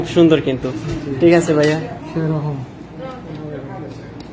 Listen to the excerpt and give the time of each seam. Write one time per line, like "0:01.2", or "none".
0:03.2